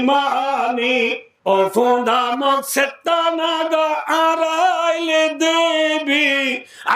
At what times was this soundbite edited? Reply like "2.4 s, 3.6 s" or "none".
1.3 s